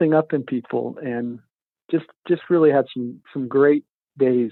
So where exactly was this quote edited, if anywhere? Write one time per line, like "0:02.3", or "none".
none